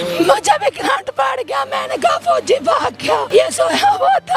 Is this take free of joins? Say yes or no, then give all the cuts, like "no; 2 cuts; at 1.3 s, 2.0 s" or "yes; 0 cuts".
no; 1 cut; at 3.2 s